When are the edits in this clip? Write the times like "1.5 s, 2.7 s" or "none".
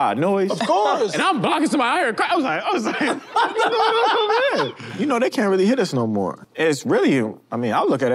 4.9 s, 6.5 s